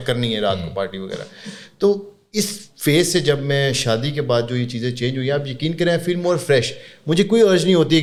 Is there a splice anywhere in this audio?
no; 0 cuts

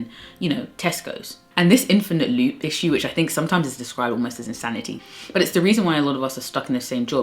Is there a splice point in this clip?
yes; 2 cuts; at 1.4 s, 5.0 s

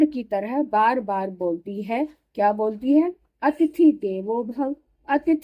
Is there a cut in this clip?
no; 0 cuts

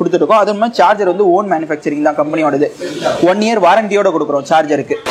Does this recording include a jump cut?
no; 0 cuts

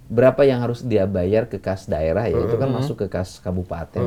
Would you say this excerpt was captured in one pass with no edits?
yes; 0 cuts

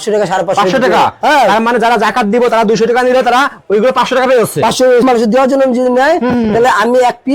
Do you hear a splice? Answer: yes; 1 cut; at 5.0 s

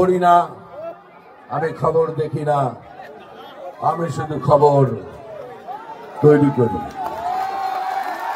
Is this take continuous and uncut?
yes; 0 cuts

